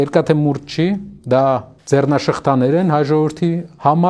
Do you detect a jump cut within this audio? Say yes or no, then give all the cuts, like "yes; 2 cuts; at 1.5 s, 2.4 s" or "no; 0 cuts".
yes; 2 cuts; at 1.1 s, 1.7 s